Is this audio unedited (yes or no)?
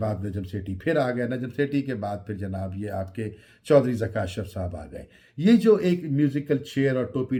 yes